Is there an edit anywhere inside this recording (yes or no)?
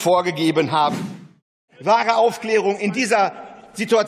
yes